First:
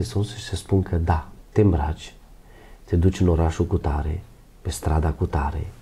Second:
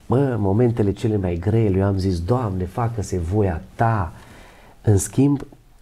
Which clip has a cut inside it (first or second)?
first